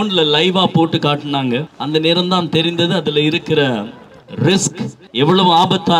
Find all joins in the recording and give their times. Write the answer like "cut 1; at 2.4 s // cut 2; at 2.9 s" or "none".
cut 1; at 5.0 s